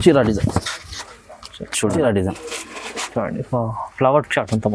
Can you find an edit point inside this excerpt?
yes; 1 cut; at 2.0 s

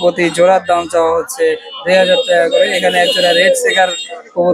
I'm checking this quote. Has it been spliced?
no; 0 cuts

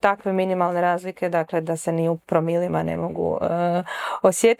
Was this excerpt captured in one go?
yes; 0 cuts

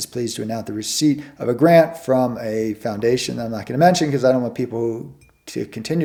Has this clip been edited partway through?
no; 0 cuts

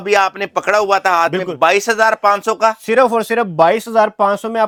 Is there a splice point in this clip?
no; 0 cuts

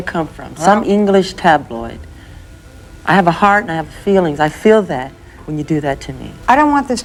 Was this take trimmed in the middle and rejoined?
no; 0 cuts

